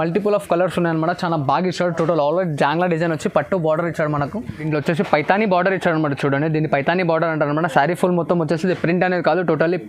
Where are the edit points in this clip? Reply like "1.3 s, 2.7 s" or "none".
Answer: 4.6 s